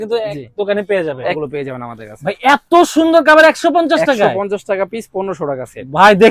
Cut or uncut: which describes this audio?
cut